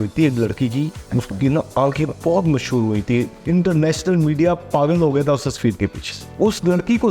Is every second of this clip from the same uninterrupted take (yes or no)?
no